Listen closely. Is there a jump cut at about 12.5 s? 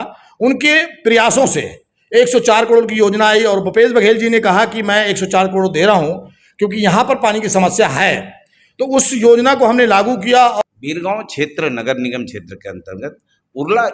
no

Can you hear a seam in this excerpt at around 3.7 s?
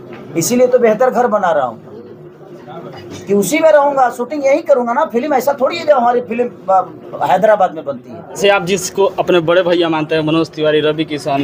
no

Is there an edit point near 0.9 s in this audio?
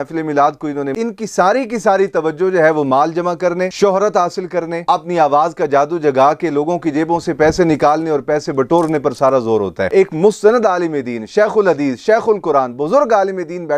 yes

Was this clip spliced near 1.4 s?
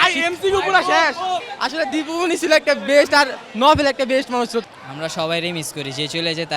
yes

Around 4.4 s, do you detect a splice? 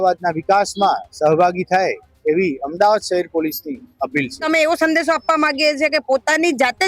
yes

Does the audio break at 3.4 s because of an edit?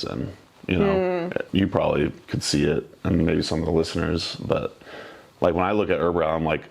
no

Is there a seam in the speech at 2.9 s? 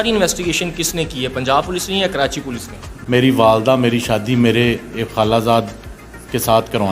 yes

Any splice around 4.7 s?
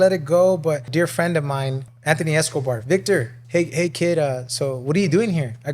no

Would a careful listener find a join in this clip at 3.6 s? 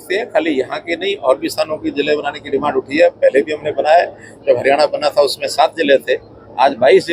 no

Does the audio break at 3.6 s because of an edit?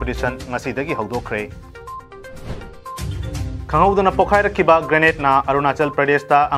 no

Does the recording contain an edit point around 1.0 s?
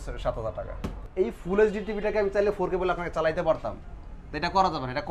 yes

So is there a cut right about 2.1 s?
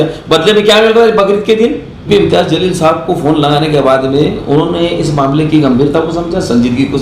yes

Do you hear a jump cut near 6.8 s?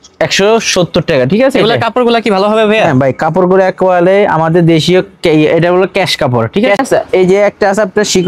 yes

